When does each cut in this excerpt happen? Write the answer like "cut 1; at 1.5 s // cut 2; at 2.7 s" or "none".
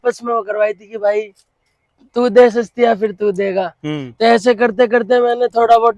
none